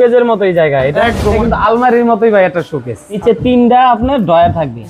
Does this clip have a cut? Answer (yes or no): yes